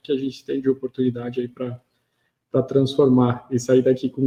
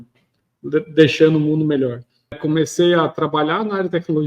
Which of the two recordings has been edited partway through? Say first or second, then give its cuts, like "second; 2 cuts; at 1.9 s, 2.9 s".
second; 1 cut; at 2.4 s